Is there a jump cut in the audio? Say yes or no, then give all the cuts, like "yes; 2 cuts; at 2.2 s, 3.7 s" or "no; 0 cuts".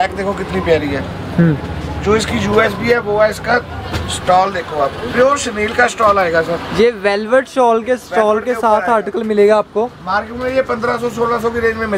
no; 0 cuts